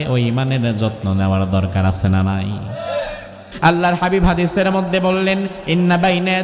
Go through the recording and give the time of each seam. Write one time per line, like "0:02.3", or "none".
0:03.4